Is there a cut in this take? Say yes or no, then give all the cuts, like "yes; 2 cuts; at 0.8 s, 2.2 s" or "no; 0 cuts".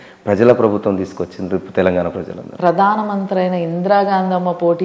yes; 1 cut; at 2.4 s